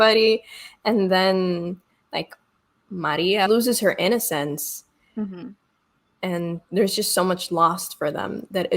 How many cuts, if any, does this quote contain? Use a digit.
1